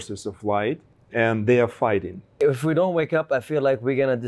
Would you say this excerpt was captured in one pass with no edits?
no; 2 cuts; at 0.9 s, 2.4 s

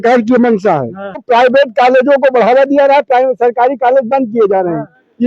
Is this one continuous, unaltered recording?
no; 1 cut; at 1.2 s

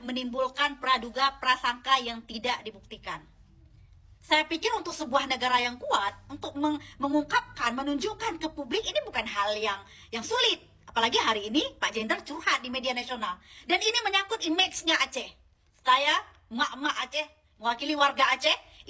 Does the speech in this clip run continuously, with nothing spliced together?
yes; 0 cuts

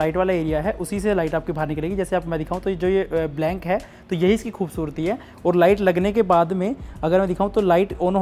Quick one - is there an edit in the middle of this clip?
no; 0 cuts

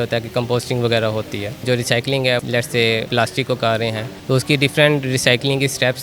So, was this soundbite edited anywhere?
yes; 3 cuts; at 1.6 s, 2.9 s, 4.1 s

